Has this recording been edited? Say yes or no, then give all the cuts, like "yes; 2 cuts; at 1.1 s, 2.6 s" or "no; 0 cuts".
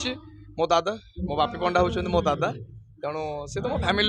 no; 0 cuts